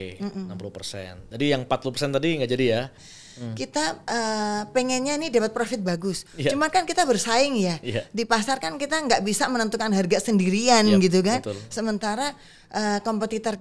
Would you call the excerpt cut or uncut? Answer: cut